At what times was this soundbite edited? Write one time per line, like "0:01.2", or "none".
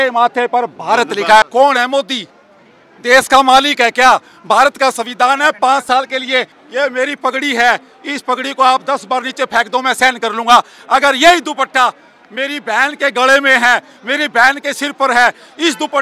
0:01.4
0:06.6